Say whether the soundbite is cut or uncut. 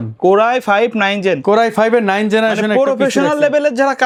uncut